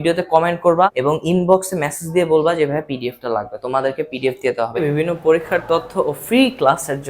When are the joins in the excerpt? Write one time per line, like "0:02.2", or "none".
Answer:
0:00.9
0:04.8